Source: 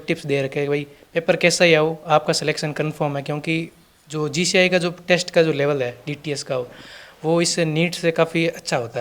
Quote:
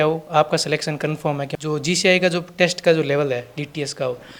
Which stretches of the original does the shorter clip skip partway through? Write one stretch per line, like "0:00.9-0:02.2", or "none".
0:03.3-0:04.0